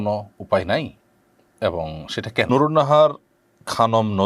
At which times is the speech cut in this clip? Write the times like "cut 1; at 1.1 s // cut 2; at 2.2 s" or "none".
cut 1; at 2.5 s